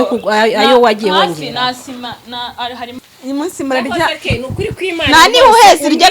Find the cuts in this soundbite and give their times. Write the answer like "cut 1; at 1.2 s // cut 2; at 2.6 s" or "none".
cut 1; at 3.0 s